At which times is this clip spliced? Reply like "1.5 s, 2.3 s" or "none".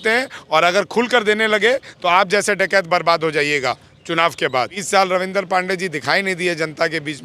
4.8 s